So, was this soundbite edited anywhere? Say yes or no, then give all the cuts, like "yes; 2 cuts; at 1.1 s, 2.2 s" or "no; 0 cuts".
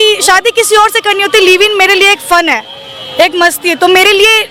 no; 0 cuts